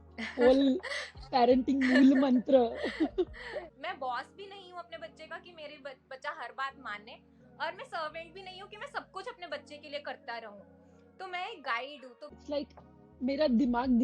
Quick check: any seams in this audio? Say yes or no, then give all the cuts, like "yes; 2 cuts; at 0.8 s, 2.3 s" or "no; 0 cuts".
yes; 2 cuts; at 3.7 s, 12.3 s